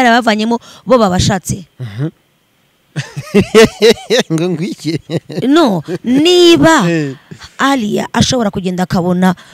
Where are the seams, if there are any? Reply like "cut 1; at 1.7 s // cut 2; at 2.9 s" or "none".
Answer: none